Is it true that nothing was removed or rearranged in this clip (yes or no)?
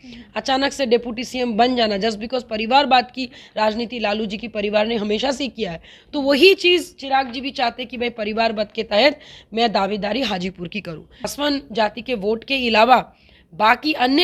no